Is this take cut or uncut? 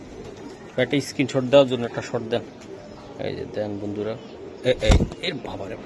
uncut